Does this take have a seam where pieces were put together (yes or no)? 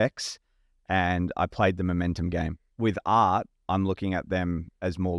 yes